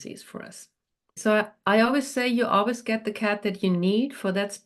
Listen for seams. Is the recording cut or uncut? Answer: cut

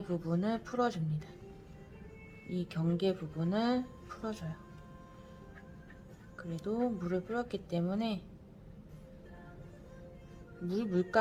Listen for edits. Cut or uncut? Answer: uncut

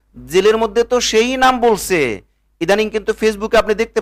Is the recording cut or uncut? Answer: uncut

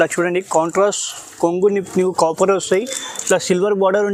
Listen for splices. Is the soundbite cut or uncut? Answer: uncut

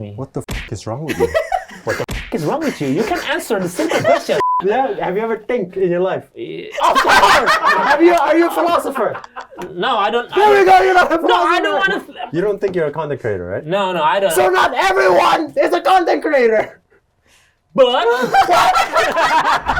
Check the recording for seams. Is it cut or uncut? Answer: cut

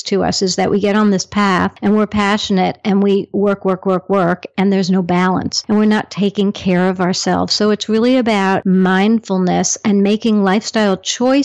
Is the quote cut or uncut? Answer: cut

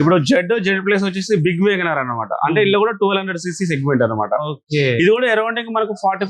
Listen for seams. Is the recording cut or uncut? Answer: uncut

